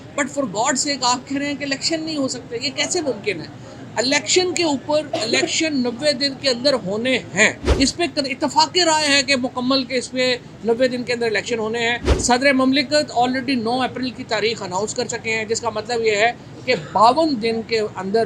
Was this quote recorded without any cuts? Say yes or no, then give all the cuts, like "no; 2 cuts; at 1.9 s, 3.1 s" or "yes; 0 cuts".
no; 2 cuts; at 7.6 s, 12.1 s